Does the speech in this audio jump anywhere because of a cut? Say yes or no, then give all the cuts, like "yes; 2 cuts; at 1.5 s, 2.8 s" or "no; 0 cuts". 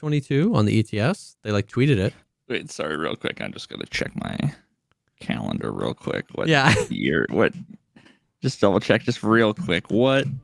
yes; 1 cut; at 2.3 s